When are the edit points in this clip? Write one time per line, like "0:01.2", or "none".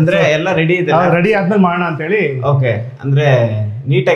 none